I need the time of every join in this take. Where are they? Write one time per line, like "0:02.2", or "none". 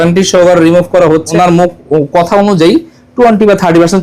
0:01.3

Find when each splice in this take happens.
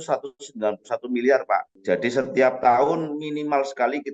0:01.7

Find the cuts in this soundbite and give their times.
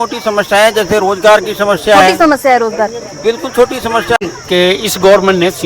0:04.2

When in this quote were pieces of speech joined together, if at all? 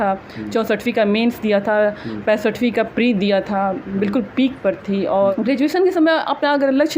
0:05.3

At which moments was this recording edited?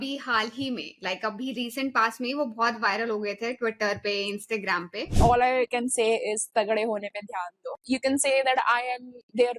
0:05.1
0:07.8

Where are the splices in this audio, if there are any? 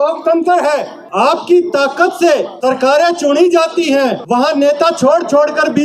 0:01.0
0:02.5
0:04.2

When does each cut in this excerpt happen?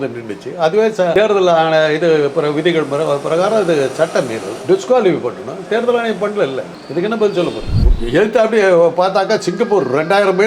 0:07.8

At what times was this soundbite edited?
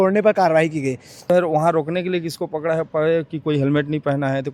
0:01.3

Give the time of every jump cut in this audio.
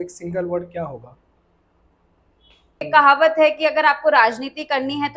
0:02.9

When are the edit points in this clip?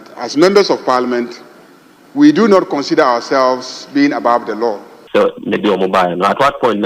0:05.0

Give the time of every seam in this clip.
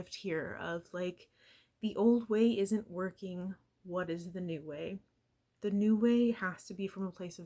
none

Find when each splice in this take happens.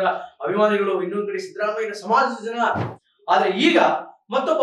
0:02.9

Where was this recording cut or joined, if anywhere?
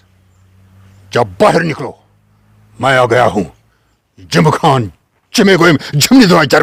none

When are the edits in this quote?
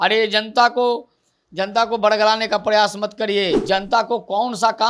0:03.6

